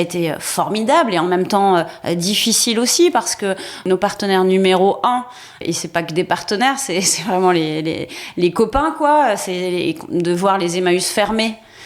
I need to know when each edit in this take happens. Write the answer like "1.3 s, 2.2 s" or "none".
3.8 s, 5.6 s

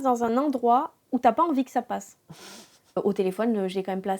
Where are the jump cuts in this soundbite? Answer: 3.0 s

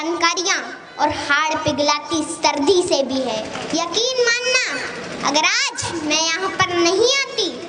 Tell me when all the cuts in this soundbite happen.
3.6 s

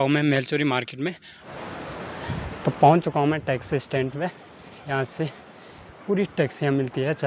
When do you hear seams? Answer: 1.2 s

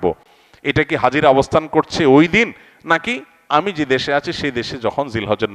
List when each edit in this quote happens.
none

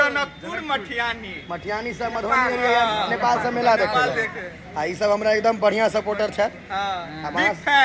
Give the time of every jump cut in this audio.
none

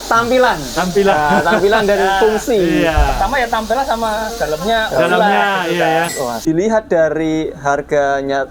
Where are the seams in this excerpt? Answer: 6.4 s

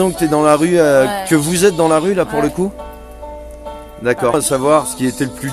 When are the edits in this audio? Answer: 4.3 s

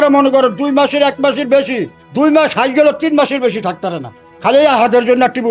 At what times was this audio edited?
none

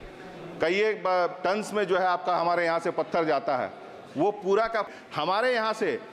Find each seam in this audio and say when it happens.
4.9 s

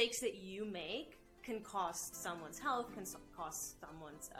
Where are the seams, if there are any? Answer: none

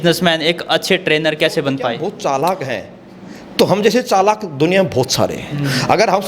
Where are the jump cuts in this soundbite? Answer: 2.0 s

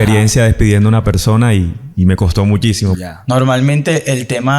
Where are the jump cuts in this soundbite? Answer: 3.0 s

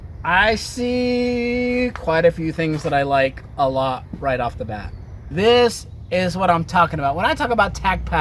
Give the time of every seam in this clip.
5.3 s

